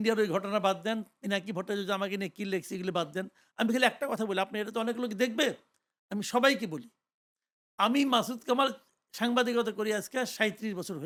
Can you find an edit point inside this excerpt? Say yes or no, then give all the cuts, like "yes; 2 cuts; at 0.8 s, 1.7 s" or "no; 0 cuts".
no; 0 cuts